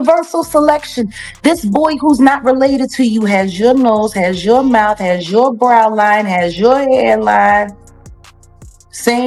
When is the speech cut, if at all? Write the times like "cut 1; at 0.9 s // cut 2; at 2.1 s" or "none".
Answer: none